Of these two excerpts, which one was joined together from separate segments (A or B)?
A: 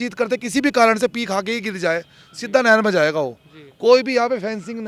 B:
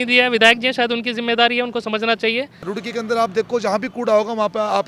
B